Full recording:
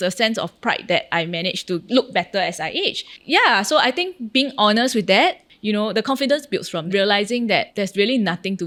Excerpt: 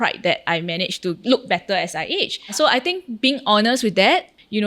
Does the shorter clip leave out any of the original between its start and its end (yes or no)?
yes